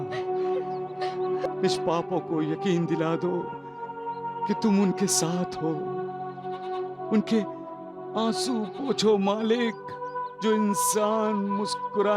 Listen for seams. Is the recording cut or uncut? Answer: cut